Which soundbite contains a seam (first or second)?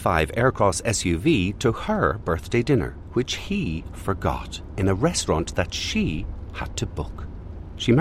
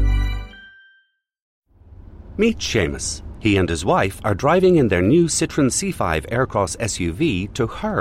second